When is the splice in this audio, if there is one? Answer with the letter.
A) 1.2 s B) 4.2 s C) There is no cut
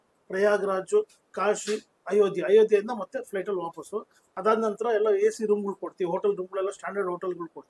B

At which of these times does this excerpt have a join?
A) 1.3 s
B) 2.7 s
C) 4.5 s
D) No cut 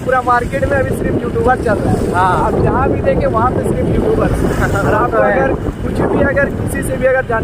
D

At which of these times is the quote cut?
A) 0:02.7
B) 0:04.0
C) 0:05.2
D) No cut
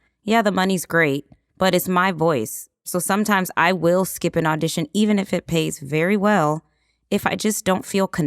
A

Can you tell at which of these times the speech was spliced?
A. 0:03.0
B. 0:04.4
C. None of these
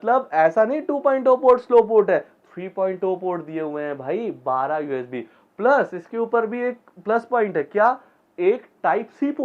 C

